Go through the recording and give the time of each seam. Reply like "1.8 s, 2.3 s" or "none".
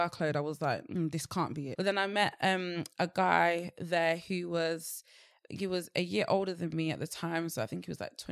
1.6 s